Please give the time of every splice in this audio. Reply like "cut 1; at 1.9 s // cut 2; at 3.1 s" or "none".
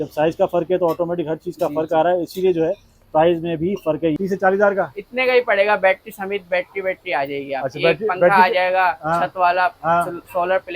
cut 1; at 4.2 s